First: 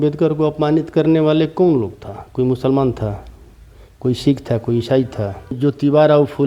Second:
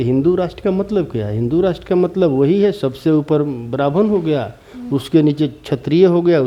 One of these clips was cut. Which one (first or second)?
first